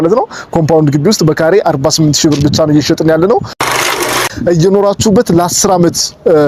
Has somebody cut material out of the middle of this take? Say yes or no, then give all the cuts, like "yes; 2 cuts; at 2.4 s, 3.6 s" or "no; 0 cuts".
yes; 1 cut; at 4.1 s